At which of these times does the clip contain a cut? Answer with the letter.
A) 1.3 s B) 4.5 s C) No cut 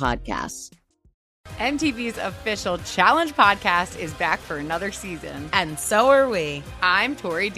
A